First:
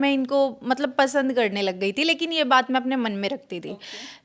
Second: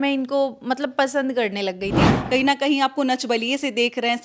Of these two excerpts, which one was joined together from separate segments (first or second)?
second